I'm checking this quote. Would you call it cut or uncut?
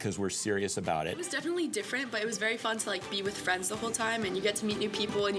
cut